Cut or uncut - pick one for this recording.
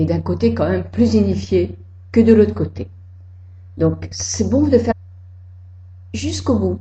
uncut